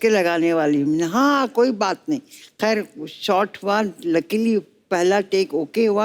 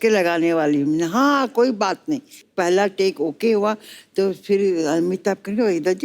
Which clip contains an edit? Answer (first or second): second